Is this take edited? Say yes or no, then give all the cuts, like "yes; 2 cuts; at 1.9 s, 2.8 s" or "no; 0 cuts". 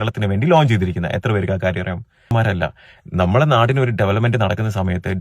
yes; 1 cut; at 2.3 s